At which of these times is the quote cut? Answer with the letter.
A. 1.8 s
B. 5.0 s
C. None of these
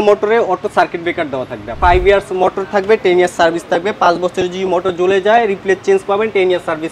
A